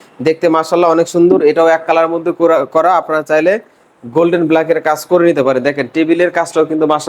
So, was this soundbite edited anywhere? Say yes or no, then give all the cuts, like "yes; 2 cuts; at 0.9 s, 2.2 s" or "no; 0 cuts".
no; 0 cuts